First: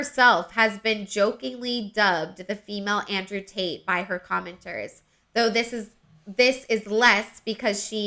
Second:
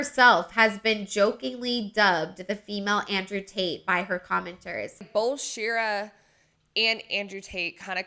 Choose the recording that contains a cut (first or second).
second